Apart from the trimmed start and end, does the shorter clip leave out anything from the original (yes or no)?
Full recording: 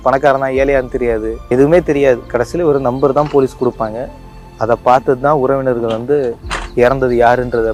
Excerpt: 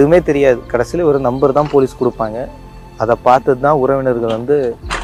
no